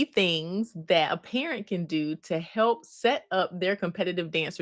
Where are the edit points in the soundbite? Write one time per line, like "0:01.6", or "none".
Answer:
none